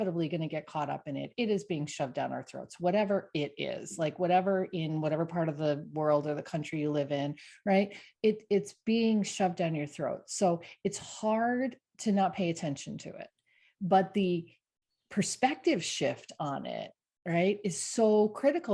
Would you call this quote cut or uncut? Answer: uncut